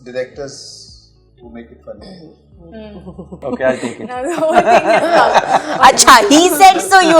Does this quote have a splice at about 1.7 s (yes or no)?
no